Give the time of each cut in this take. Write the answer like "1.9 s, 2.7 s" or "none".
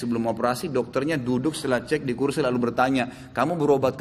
none